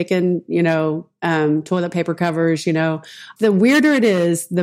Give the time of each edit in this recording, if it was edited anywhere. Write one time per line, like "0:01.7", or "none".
0:03.2